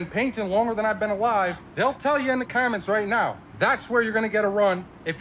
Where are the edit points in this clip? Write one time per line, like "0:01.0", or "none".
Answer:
0:01.6
0:03.4